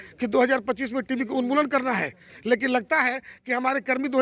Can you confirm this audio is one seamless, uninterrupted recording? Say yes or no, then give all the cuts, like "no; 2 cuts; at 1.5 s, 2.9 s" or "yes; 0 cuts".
yes; 0 cuts